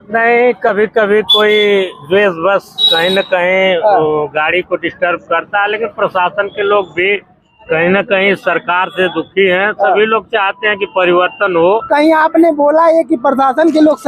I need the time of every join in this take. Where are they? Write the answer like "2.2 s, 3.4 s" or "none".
11.8 s

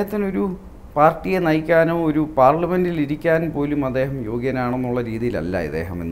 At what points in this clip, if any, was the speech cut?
none

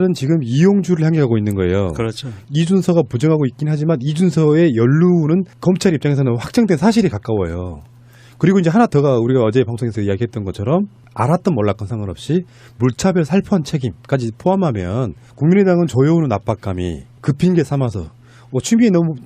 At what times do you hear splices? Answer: none

